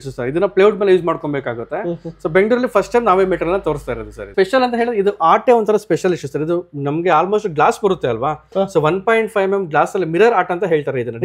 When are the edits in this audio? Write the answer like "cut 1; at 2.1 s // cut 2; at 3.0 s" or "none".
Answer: cut 1; at 4.3 s